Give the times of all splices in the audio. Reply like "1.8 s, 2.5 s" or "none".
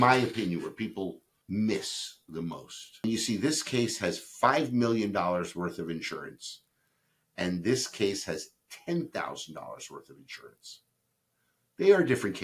1.3 s, 3.0 s